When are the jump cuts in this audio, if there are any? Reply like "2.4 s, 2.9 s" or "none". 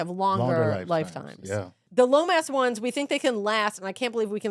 1.8 s

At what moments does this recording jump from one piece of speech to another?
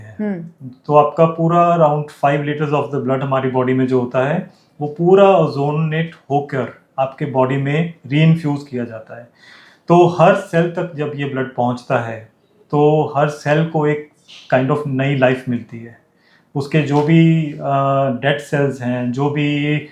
none

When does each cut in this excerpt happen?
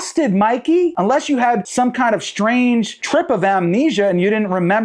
1.7 s

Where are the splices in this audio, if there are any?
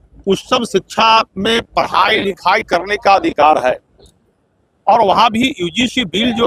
none

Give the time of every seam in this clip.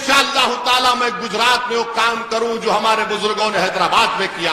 none

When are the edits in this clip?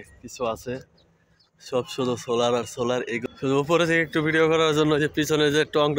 3.3 s

